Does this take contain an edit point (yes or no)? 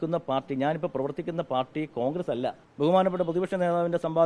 yes